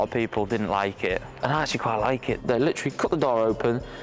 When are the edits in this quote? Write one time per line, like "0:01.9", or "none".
0:01.3
0:02.4